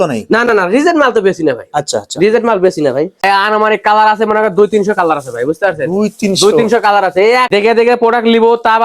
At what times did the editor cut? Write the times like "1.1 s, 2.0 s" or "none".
3.2 s, 7.5 s